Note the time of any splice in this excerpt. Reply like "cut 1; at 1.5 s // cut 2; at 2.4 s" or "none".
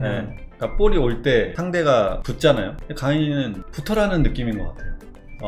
cut 1; at 1.6 s // cut 2; at 2.3 s